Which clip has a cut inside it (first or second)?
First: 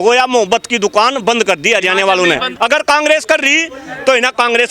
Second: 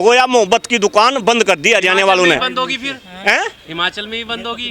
first